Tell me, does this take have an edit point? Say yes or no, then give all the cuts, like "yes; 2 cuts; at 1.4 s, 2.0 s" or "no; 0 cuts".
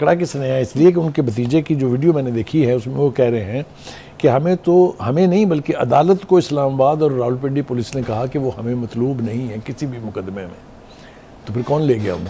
no; 0 cuts